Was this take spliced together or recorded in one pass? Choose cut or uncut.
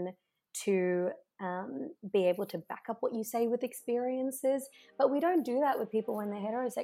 uncut